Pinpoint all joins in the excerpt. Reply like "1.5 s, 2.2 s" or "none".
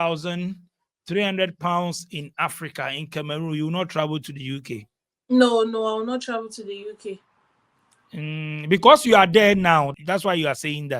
9.9 s